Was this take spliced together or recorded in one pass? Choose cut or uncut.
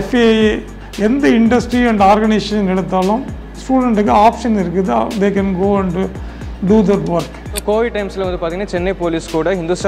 cut